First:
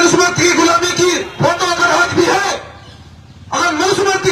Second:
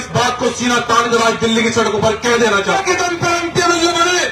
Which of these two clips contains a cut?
second; 1 cut; at 2.7 s

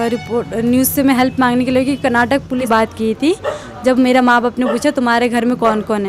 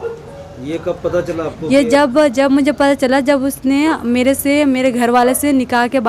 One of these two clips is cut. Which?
first; 1 cut; at 2.6 s

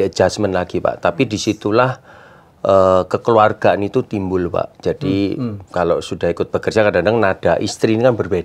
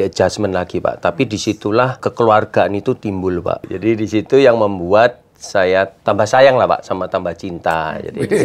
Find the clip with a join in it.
second; 3 cuts; at 2.0 s, 3.7 s, 5.9 s

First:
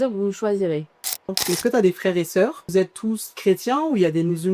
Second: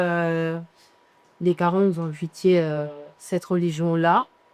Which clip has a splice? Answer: first; 2 cuts; at 1.4 s, 2.6 s

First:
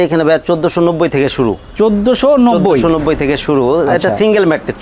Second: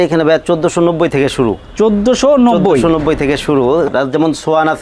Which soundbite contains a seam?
second; 1 cut; at 3.9 s

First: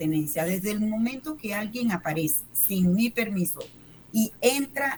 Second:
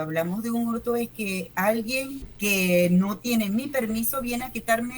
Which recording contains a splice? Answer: second; 1 cut; at 2.2 s

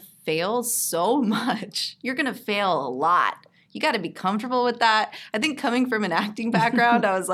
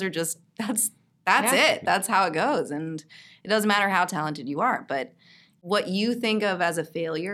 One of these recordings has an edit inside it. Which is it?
second; 1 cut; at 5.5 s

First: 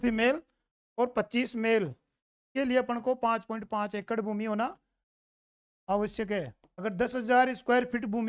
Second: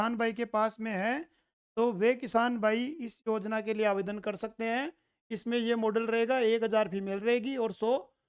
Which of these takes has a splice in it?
first; 1 cut; at 6.6 s

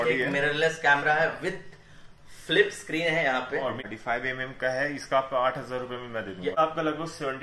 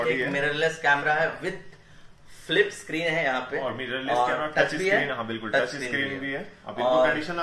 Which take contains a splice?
first; 2 cuts; at 3.8 s, 6.5 s

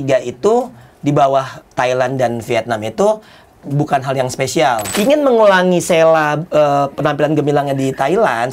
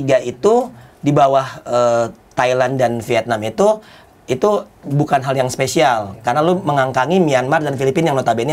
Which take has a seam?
first; 3 cuts; at 1.6 s, 3.5 s, 4.9 s

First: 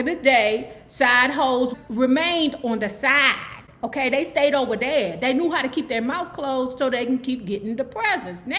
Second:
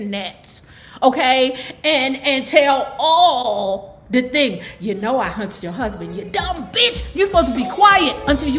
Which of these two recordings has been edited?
first; 1 cut; at 1.7 s

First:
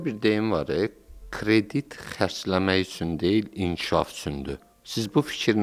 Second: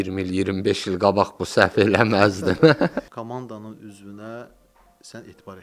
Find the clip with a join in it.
second; 1 cut; at 3.1 s

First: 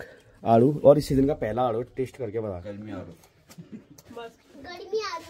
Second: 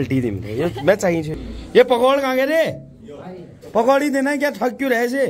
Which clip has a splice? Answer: second; 1 cut; at 1.3 s

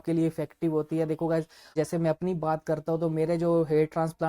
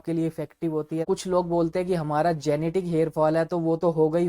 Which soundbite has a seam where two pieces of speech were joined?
second; 1 cut; at 1.0 s

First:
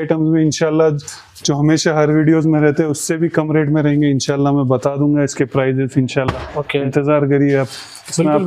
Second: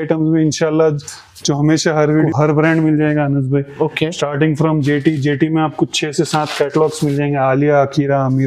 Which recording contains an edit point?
second; 1 cut; at 2.3 s

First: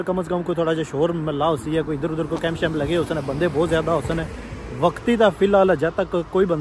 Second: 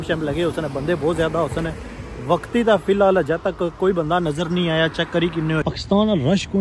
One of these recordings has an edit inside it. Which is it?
second; 1 cut; at 5.6 s

